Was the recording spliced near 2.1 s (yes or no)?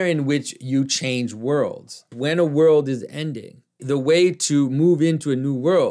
yes